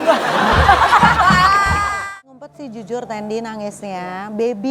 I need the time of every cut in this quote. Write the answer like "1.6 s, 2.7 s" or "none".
2.0 s